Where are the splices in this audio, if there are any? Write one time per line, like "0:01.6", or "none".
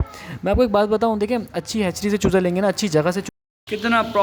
0:03.3